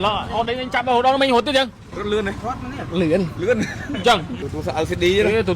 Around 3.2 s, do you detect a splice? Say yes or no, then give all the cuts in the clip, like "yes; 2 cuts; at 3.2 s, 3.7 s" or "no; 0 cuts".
no; 1 cut; at 1.8 s